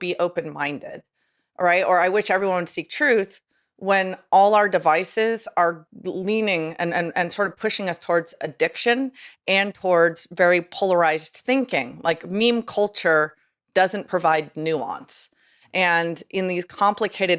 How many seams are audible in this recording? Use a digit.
1